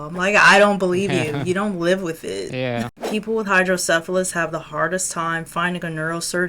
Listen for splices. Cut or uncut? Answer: cut